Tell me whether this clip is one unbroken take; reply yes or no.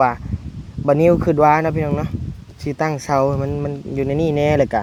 yes